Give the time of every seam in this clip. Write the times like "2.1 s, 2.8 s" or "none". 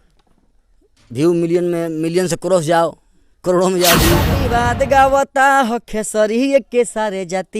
4.4 s